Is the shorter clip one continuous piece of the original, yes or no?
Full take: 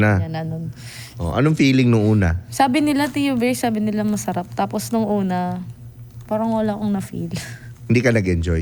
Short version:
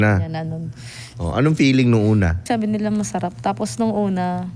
no